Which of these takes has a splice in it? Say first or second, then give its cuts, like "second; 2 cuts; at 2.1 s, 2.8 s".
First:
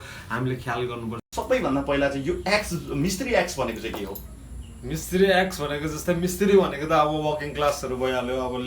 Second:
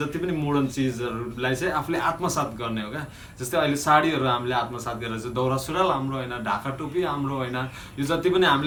first; 1 cut; at 1.1 s